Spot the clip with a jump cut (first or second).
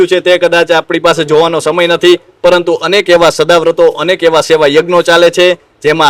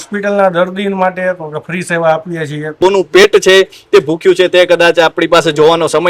second